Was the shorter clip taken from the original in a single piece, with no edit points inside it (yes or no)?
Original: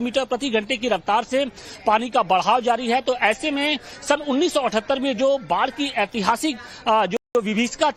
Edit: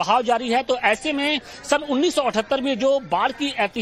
yes